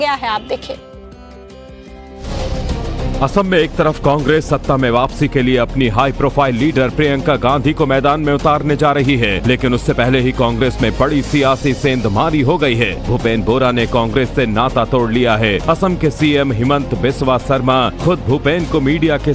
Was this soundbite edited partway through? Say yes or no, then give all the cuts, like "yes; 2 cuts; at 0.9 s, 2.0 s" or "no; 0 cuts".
yes; 1 cut; at 7.5 s